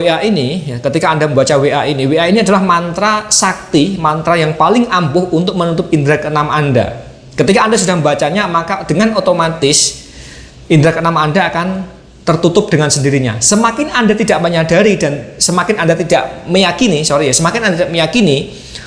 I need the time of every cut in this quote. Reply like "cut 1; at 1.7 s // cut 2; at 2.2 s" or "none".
none